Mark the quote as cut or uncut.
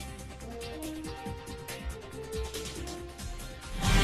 uncut